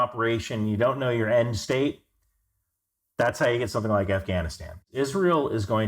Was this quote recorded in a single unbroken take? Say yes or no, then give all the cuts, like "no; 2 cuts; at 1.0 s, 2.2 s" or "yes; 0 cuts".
no; 1 cut; at 4.9 s